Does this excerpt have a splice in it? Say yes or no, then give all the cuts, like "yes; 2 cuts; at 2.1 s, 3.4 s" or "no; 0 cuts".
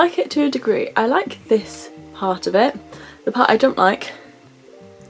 no; 0 cuts